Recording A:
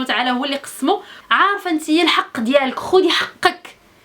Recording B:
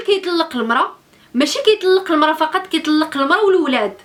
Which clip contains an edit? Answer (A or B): A